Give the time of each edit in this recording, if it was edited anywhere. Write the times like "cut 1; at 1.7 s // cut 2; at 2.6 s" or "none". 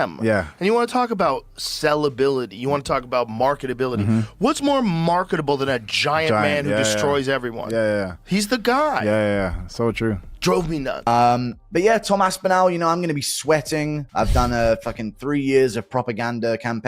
cut 1; at 11.1 s